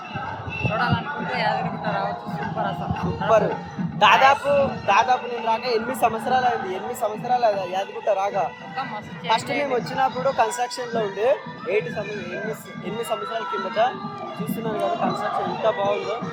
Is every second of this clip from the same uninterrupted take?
yes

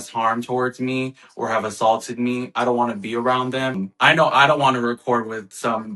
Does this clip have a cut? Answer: yes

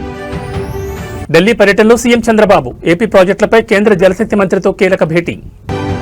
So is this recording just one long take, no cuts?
yes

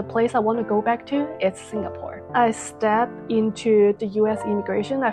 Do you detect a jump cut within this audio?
yes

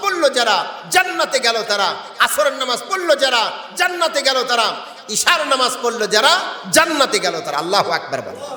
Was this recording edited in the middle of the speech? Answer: no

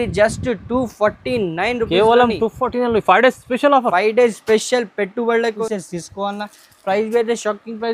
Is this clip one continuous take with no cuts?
no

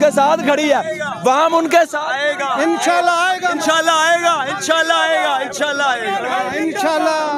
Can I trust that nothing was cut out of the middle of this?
yes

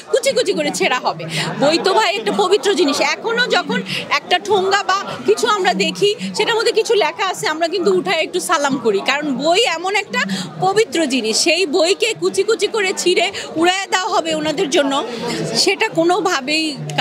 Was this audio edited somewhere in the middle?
no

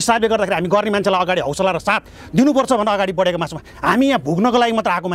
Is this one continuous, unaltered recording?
yes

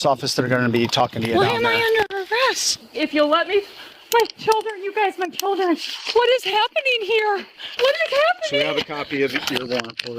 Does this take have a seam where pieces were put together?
yes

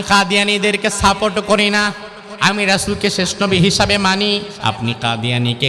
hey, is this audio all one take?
no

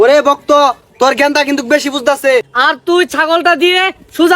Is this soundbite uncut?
no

